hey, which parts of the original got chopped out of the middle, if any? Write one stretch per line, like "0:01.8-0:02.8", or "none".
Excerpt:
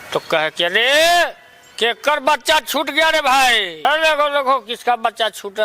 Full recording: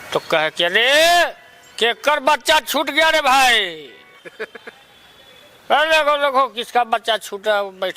0:03.8-0:05.7